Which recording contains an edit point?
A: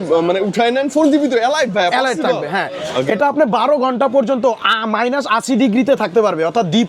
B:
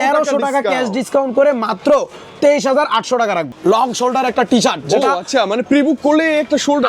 B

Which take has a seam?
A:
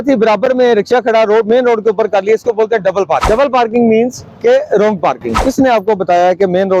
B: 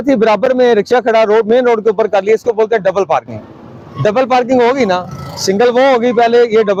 A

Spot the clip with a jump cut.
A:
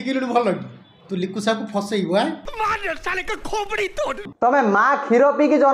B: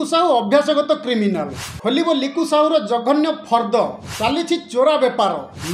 A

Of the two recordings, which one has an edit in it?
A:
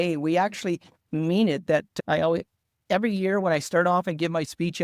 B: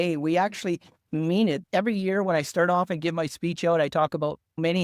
B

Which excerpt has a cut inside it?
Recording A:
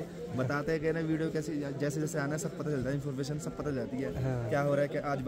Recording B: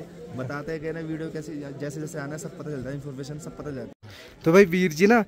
B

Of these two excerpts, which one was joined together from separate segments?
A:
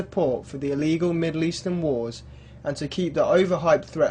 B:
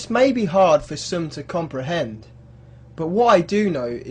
B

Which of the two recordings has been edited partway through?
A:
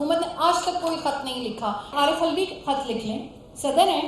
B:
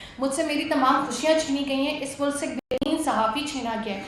A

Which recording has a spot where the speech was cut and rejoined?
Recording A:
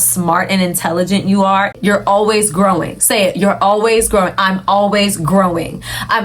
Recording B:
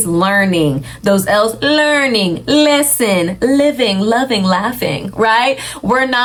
A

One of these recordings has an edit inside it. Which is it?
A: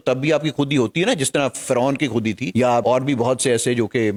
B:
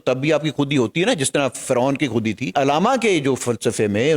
B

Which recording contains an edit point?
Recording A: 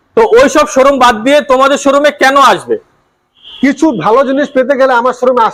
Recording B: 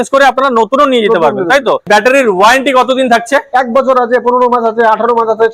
B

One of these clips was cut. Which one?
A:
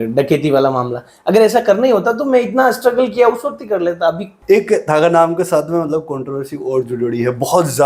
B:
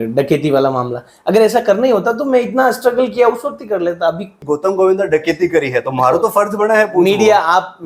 A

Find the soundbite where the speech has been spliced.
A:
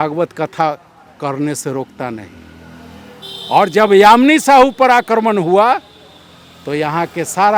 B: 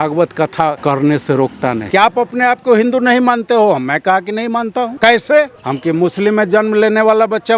B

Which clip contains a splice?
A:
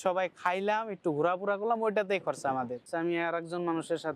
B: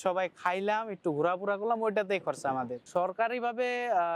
A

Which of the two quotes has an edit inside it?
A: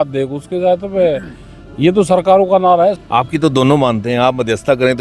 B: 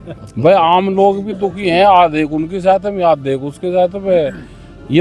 A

